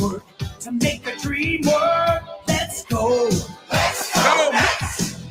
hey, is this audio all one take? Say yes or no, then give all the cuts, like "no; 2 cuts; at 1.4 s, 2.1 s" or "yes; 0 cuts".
yes; 0 cuts